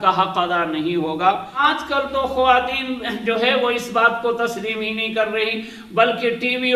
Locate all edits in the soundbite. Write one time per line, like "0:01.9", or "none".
0:01.6